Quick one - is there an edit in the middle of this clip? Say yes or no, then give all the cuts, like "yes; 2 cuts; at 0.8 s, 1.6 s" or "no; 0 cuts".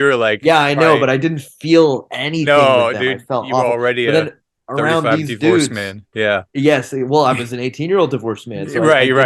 no; 0 cuts